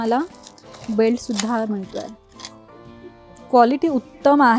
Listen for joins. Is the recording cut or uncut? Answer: uncut